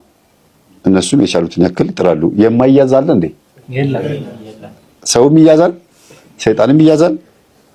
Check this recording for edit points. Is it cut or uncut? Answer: uncut